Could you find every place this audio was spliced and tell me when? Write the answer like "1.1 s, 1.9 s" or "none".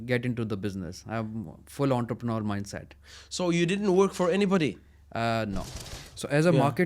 5.7 s